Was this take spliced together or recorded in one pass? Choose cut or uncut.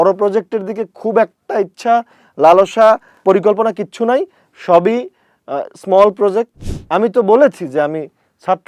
cut